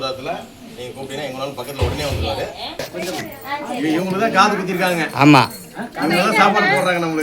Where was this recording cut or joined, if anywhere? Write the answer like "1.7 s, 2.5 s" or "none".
2.8 s